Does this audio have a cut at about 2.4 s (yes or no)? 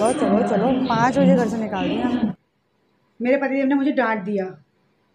yes